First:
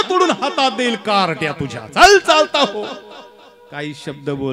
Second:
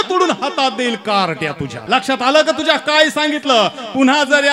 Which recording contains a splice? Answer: second; 1 cut; at 1.7 s

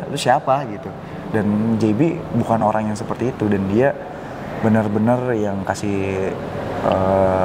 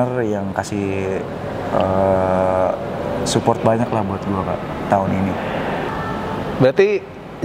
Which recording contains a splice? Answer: second; 1 cut; at 5.9 s

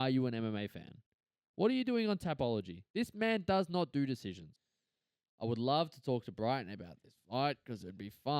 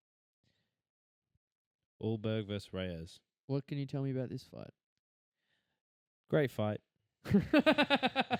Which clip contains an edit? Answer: first; 1 cut; at 4.5 s

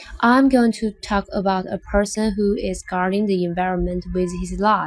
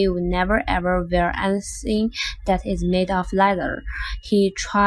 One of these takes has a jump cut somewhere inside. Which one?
second; 1 cut; at 2.3 s

